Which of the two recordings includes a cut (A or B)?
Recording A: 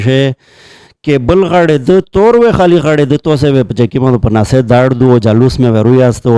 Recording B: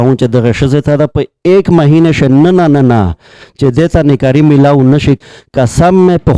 B